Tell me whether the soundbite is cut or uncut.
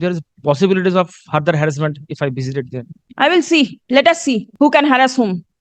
cut